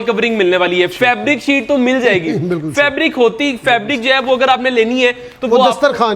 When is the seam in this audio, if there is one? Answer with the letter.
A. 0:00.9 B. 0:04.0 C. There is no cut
C